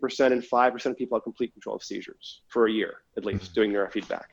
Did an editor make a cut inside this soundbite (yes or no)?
no